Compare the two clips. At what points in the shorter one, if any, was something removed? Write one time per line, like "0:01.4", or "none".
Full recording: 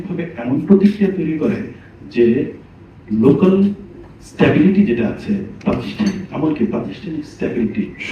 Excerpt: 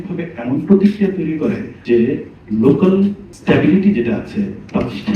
0:01.7
0:02.3
0:03.3